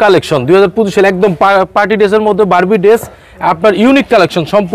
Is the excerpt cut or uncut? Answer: uncut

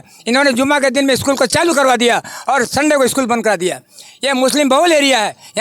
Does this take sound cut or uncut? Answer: uncut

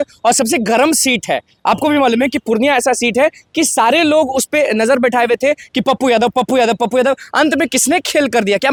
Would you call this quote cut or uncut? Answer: uncut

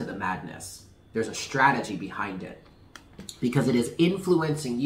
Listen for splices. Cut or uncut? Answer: uncut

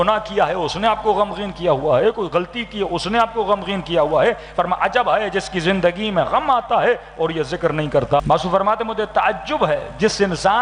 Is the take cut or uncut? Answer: cut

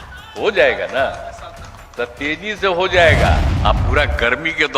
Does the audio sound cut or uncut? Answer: cut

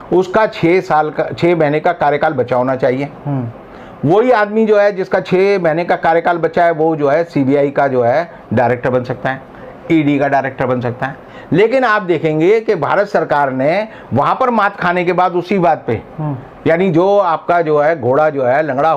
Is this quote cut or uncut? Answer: uncut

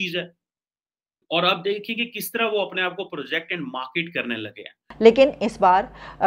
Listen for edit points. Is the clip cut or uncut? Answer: cut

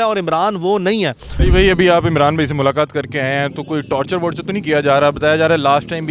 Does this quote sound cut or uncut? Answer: cut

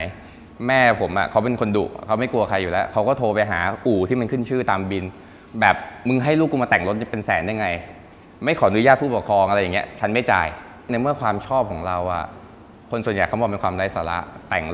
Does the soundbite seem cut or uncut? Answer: cut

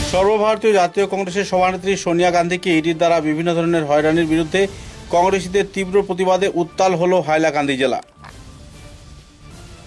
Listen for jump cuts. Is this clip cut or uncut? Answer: uncut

